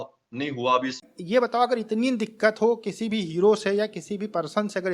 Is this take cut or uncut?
cut